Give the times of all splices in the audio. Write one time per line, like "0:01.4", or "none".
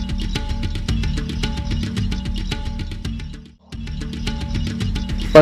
0:00.9
0:04.4